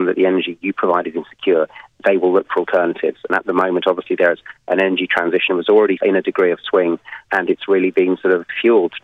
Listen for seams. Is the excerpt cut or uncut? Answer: uncut